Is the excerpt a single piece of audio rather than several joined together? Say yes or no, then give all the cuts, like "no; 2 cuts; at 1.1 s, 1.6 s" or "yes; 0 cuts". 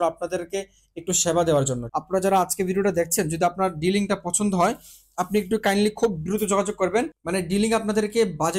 no; 2 cuts; at 1.8 s, 7.2 s